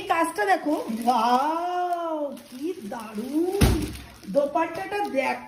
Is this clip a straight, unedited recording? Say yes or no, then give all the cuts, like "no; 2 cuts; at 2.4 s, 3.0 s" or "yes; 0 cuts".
yes; 0 cuts